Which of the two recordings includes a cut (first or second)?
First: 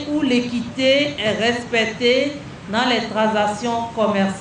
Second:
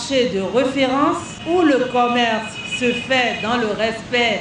second